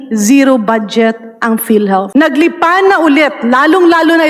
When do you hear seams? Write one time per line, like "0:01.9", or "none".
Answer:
0:02.1